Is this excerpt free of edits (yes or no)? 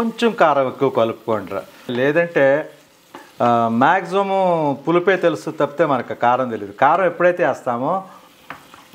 yes